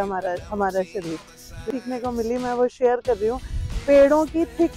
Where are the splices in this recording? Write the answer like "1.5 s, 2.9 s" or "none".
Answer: 1.7 s